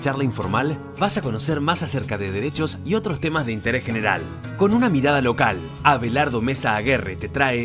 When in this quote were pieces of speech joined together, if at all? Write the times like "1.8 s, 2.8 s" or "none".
none